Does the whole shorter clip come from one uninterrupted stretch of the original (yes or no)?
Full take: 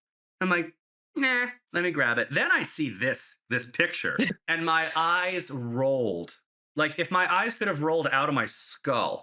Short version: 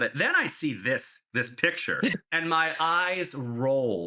yes